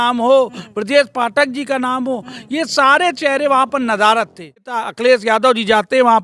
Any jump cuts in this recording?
yes; 1 cut; at 4.8 s

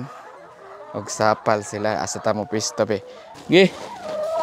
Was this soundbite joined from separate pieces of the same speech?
yes; 1 cut; at 3.3 s

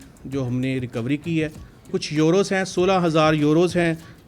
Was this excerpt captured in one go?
no; 1 cut; at 1.9 s

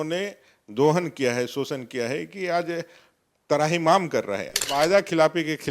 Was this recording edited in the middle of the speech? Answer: yes; 1 cut; at 4.7 s

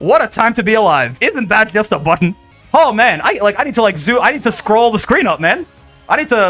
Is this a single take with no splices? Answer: no; 1 cut; at 2.5 s

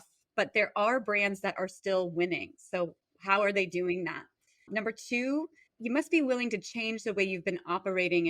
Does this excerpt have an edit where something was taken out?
yes; 2 cuts; at 3.1 s, 5.6 s

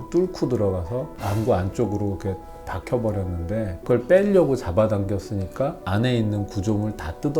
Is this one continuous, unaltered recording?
no; 3 cuts; at 1.2 s, 3.8 s, 5.8 s

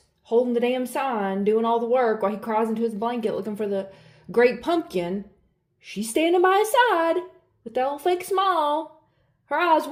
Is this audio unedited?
yes; 0 cuts

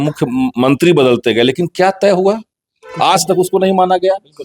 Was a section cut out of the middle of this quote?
no; 0 cuts

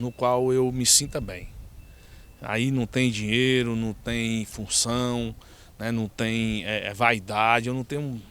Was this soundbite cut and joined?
no; 0 cuts

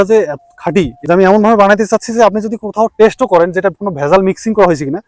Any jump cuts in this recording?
yes; 1 cut; at 1.0 s

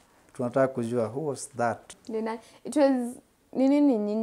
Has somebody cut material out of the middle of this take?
yes; 1 cut; at 2.0 s

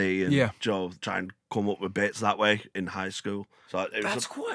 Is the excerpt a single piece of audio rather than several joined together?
no; 2 cuts; at 1.0 s, 3.6 s

